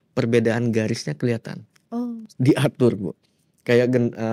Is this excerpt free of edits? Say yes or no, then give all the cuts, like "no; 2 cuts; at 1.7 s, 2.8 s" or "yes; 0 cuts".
yes; 0 cuts